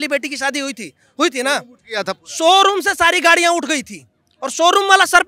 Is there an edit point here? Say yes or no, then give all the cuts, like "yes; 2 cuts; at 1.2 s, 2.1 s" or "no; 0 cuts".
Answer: no; 0 cuts